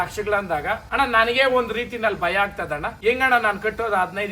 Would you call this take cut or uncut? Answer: cut